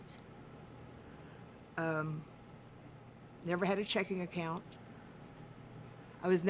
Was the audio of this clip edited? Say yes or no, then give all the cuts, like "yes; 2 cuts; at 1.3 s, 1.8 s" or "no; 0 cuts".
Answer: no; 0 cuts